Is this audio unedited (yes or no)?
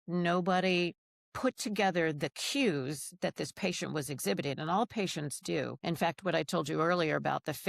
no